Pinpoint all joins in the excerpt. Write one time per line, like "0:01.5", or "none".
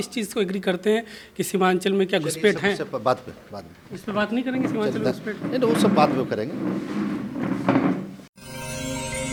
none